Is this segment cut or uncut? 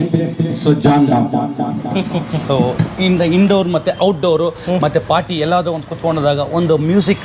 uncut